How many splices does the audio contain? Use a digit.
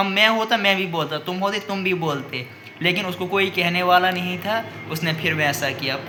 0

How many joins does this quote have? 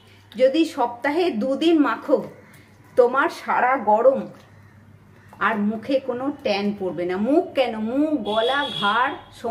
0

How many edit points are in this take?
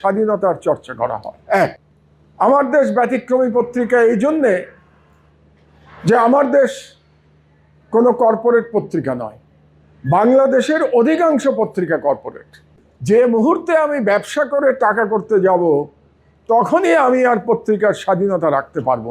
0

